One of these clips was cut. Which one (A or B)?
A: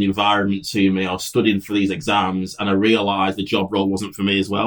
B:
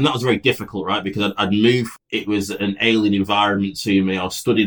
B